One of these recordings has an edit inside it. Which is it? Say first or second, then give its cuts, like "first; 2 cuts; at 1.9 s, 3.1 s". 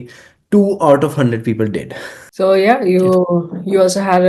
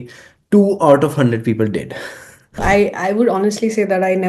second; 1 cut; at 2.5 s